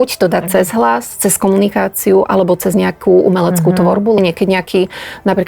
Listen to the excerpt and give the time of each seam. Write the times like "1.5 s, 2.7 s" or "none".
4.2 s